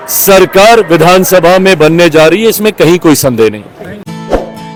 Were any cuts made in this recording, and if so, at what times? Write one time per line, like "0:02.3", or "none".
none